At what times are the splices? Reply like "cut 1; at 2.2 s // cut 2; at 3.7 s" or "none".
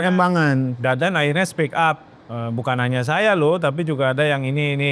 none